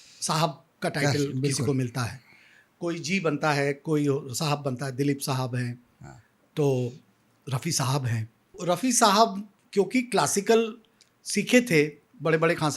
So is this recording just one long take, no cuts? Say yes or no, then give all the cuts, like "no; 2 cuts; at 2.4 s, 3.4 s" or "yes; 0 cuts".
no; 1 cut; at 8.6 s